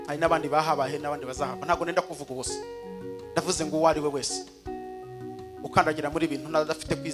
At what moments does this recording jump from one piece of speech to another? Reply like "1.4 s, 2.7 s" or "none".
4.3 s, 5.7 s